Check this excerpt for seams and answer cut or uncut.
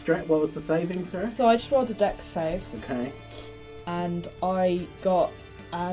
uncut